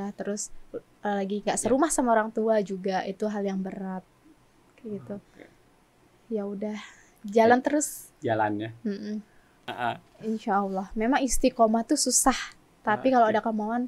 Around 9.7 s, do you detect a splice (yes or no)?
yes